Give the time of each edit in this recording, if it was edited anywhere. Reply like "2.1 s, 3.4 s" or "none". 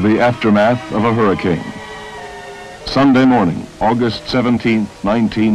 none